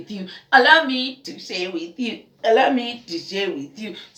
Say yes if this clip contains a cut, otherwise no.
no